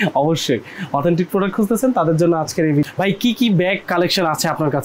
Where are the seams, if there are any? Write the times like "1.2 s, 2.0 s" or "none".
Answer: 2.9 s